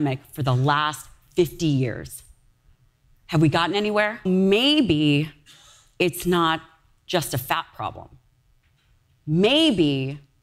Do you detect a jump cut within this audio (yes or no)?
yes